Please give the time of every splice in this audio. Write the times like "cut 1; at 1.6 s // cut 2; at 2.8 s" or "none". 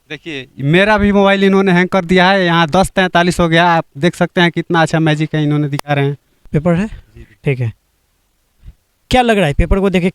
cut 1; at 6.3 s